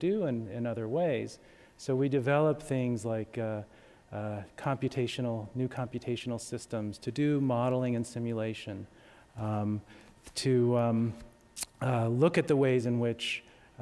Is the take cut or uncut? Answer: cut